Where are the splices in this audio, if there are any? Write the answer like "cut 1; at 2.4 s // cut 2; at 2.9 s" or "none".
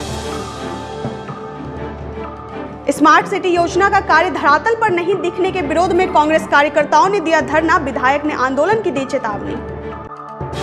cut 1; at 1.0 s